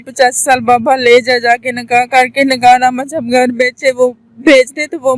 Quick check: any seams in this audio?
no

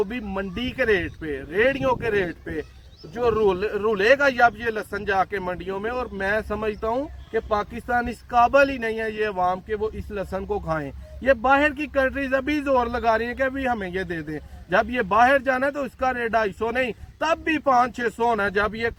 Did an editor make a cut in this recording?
no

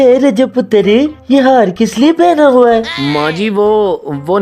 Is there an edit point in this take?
no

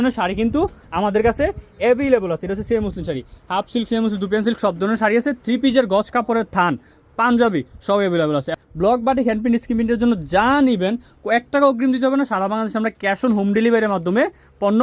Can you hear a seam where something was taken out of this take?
yes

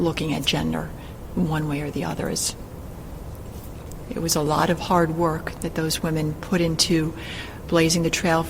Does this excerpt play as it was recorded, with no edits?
no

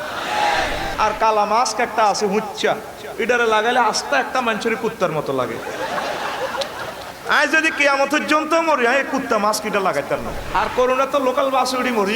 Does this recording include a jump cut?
yes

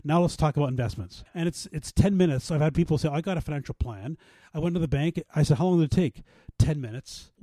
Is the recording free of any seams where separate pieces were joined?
no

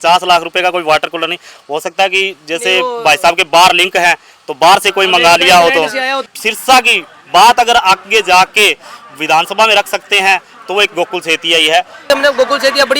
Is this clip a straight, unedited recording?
no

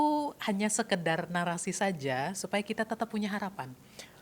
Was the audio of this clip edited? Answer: no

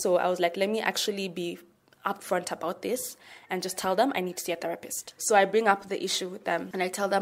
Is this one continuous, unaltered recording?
yes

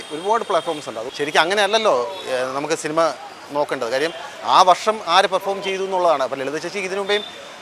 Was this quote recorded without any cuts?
no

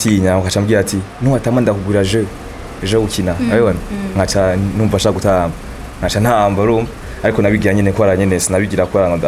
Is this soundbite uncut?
yes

